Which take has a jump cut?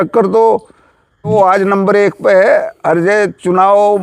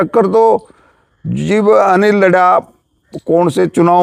first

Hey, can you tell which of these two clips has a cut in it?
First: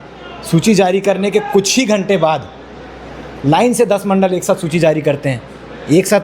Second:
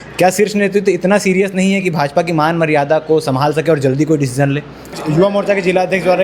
second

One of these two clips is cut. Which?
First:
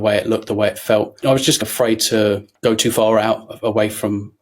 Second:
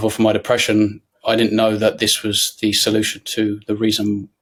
first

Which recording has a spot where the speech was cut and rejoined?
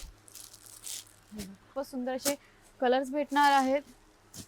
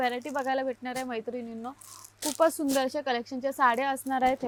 first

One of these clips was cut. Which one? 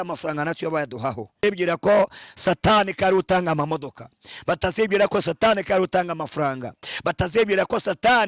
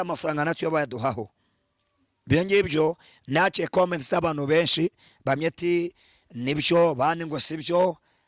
first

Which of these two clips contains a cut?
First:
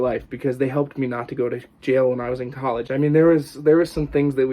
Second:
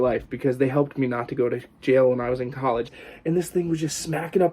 second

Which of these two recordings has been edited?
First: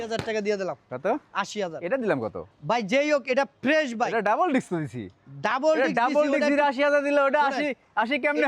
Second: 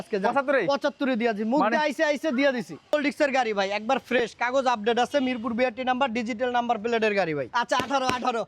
second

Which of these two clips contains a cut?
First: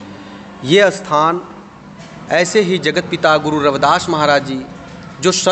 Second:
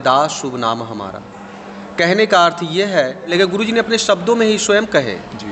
second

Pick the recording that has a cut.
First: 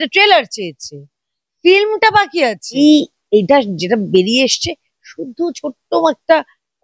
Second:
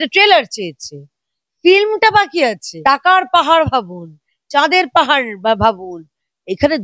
first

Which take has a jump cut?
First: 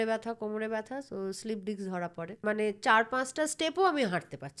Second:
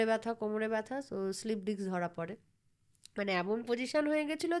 first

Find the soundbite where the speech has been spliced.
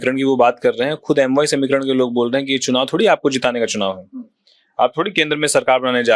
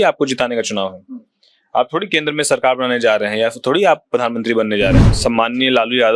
second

